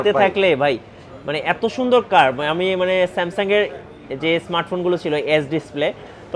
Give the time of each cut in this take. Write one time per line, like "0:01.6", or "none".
none

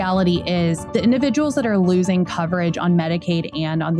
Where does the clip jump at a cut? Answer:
none

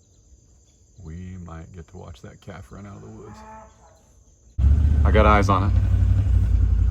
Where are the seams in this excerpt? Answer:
0:04.8

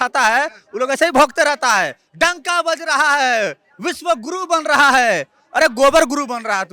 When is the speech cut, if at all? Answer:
none

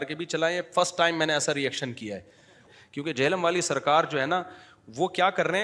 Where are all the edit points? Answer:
0:02.5

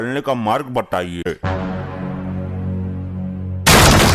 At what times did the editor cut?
0:01.3

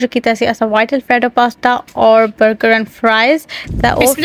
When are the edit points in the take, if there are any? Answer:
none

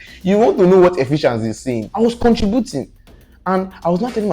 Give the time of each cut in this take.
0:01.9

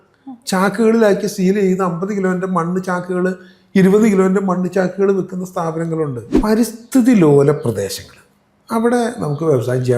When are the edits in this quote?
0:06.3

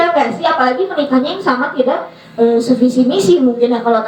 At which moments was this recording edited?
none

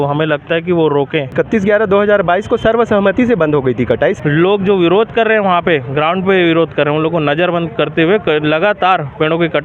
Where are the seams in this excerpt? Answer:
0:01.3
0:04.2

